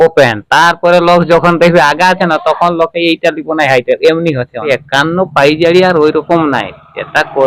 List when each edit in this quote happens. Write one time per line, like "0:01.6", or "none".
0:04.6